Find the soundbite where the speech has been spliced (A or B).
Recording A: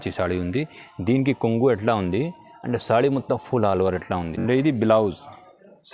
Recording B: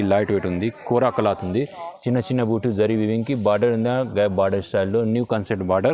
A